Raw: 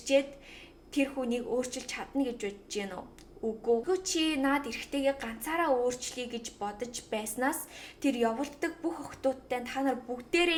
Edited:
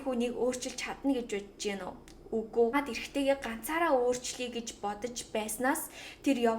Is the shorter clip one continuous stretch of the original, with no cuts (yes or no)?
no